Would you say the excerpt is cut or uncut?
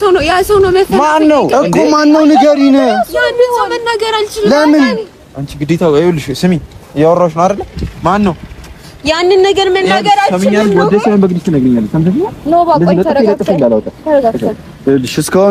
uncut